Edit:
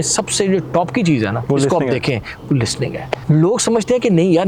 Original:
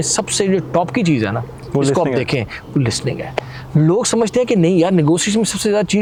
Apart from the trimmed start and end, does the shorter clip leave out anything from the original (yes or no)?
yes